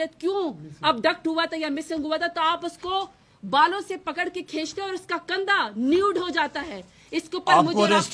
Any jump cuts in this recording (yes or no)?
no